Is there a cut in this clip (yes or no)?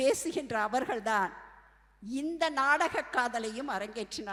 no